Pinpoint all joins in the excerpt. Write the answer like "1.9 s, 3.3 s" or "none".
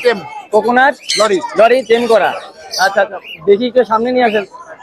none